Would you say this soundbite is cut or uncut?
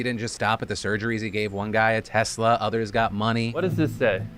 uncut